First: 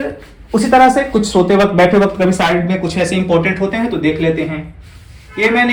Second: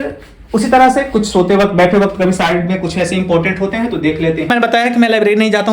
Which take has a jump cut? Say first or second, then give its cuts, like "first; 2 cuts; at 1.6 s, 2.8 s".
second; 1 cut; at 4.5 s